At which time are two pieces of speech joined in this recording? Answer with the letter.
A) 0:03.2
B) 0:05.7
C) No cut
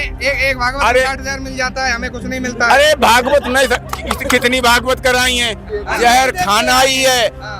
B